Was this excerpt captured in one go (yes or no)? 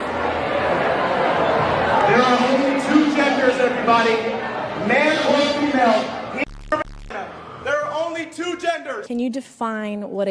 no